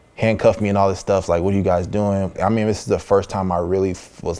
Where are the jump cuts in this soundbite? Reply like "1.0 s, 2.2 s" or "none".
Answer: 2.3 s